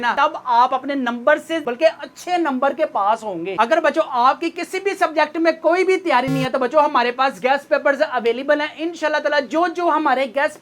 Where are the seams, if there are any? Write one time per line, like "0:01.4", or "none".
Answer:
none